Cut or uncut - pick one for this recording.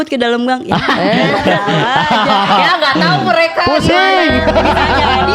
uncut